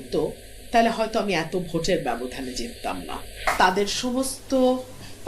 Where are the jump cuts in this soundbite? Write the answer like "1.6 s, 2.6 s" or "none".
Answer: 3.4 s